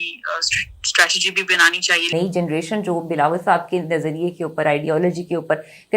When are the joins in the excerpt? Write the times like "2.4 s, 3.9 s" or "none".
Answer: 2.1 s